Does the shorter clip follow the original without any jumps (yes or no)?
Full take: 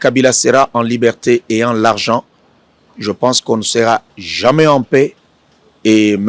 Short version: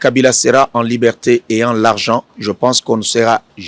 no